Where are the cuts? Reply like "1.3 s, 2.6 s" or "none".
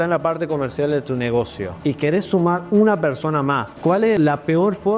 1.6 s, 4.1 s